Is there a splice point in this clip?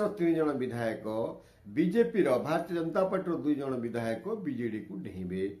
no; 0 cuts

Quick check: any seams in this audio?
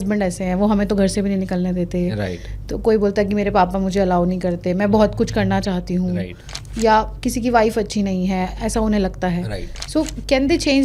no; 0 cuts

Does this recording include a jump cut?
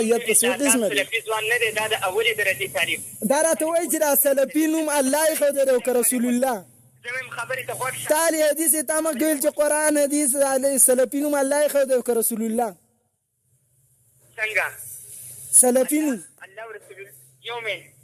yes; 1 cut; at 1.0 s

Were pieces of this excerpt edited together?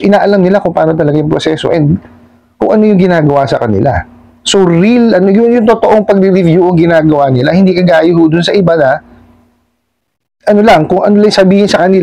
no; 0 cuts

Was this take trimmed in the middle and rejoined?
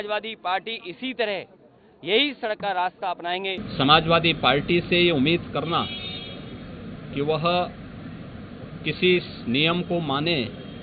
yes; 1 cut; at 3.6 s

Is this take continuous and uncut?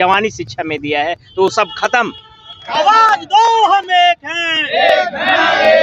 no; 1 cut; at 2.7 s

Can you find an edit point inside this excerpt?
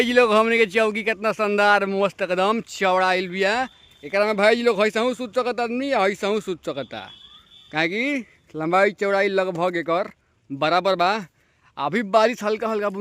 no; 0 cuts

